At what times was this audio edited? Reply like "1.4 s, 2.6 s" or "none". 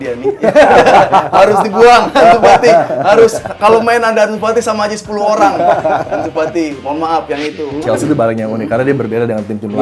7.6 s